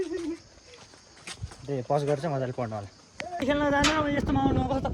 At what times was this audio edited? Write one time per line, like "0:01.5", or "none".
0:03.4